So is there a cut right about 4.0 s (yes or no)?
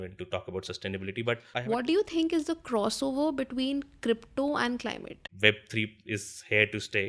no